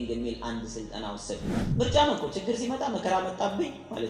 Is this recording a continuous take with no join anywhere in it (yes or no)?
no